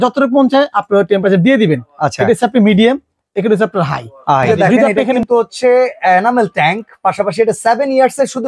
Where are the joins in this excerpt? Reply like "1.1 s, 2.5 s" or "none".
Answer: 5.2 s